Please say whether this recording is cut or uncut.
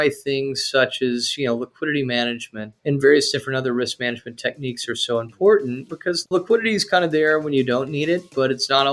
cut